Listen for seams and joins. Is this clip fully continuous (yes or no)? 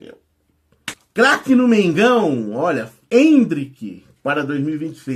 no